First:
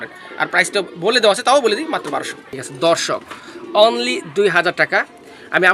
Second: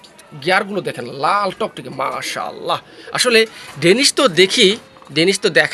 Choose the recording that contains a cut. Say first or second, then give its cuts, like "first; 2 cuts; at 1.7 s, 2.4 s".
first; 1 cut; at 2.6 s